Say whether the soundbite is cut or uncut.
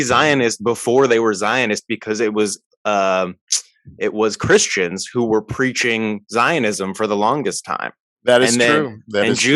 uncut